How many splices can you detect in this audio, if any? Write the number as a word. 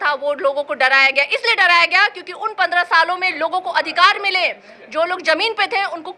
zero